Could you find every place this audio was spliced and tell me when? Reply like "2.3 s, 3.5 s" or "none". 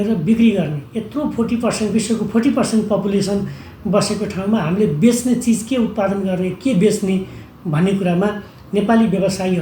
none